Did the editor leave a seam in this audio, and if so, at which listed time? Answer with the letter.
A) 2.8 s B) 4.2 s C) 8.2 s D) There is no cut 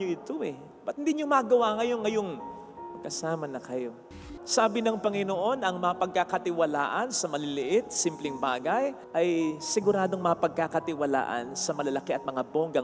B